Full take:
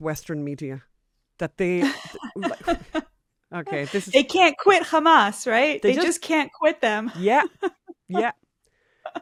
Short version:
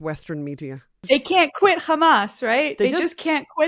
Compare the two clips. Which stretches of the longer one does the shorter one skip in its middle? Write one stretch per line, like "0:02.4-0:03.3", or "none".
0:01.0-0:04.1